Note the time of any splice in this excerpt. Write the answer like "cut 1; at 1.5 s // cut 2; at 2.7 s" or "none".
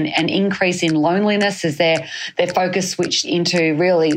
none